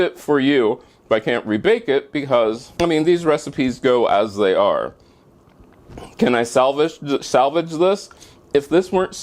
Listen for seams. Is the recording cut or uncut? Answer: cut